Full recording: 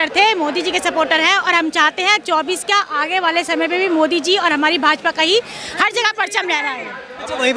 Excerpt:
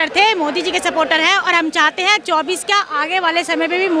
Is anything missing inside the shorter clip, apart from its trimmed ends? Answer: no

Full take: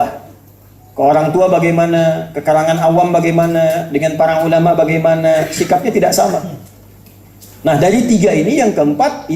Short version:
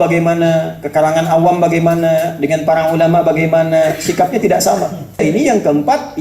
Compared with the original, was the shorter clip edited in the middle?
yes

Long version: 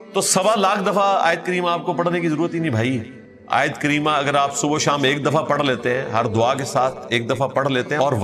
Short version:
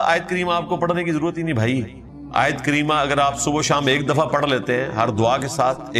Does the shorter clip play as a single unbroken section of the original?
yes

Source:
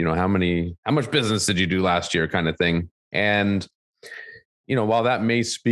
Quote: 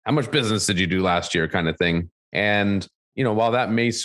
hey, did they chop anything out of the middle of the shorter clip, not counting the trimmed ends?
yes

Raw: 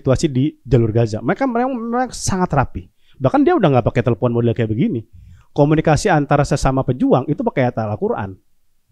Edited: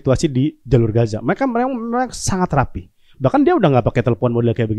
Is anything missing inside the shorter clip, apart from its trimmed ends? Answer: no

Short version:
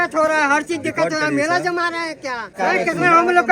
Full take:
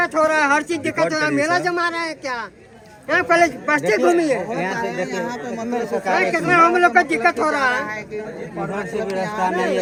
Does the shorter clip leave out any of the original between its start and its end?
yes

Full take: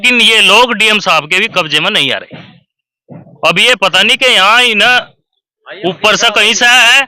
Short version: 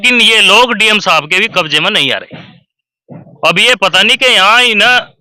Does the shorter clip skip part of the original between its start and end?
no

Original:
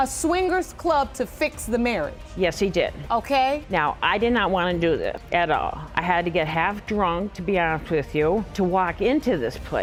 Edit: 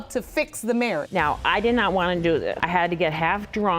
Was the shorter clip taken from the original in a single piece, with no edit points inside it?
no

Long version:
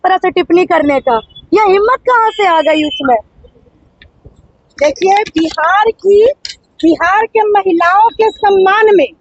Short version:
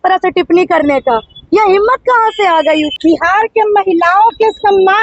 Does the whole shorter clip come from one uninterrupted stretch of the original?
no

